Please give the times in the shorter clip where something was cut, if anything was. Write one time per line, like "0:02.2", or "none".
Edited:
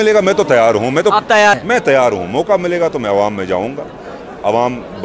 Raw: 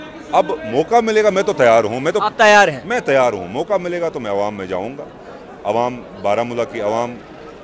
0:01.5